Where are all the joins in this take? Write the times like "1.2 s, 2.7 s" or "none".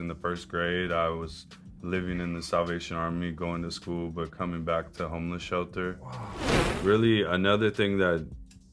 6.5 s